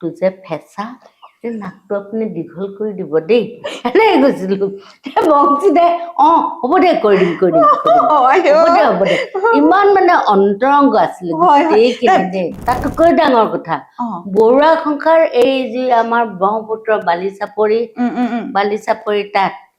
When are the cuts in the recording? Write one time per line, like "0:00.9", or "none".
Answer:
0:12.5